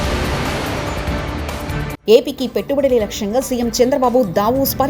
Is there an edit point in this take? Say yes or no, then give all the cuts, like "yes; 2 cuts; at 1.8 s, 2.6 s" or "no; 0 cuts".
yes; 1 cut; at 1.9 s